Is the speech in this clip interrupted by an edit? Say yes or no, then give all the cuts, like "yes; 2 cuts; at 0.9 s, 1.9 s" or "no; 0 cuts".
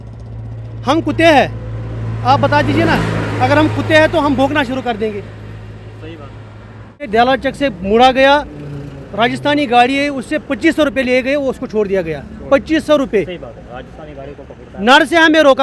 yes; 1 cut; at 7.1 s